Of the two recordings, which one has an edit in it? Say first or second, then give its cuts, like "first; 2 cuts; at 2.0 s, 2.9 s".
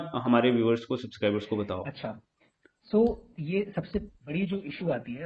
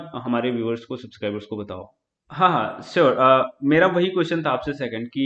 second; 1 cut; at 1.9 s